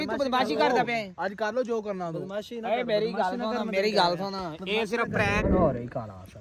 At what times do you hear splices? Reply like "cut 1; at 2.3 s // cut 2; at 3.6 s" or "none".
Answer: cut 1; at 5.4 s